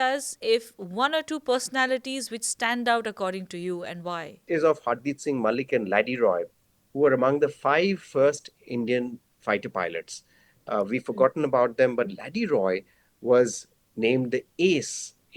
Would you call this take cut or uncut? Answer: cut